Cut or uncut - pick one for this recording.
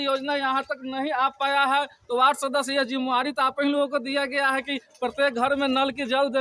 cut